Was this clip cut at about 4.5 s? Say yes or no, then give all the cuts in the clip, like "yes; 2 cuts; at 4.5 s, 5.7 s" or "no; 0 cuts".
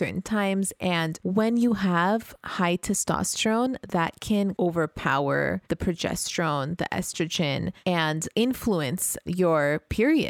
yes; 5 cuts; at 1.2 s, 4.5 s, 5.6 s, 8.1 s, 9.2 s